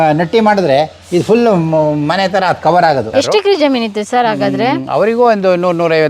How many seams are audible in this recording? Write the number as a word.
one